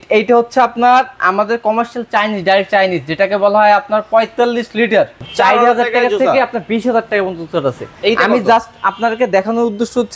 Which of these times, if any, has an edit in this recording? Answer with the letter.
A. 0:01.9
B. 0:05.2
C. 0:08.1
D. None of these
B